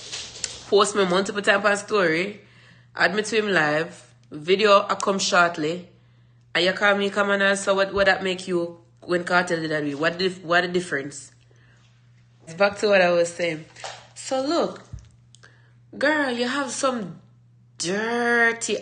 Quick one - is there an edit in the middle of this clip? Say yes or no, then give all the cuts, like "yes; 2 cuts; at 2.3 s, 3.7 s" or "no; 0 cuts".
yes; 1 cut; at 12.5 s